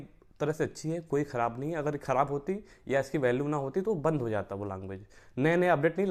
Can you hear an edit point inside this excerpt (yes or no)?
no